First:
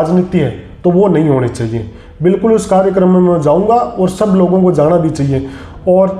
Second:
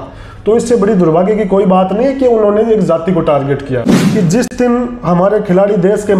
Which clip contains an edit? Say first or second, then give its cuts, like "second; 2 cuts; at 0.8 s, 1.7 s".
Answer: second; 1 cut; at 4.0 s